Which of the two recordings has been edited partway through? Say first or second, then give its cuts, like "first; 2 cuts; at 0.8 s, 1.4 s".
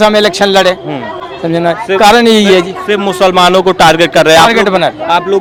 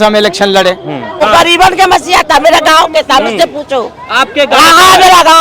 second; 1 cut; at 1.2 s